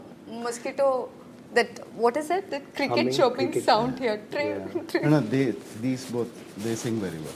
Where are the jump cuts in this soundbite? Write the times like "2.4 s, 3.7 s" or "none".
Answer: none